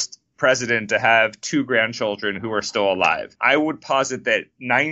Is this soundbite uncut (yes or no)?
no